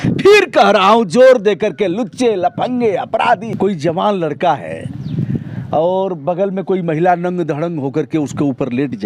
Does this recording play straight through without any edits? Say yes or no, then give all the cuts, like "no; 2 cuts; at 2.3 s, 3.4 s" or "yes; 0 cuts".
no; 1 cut; at 3.5 s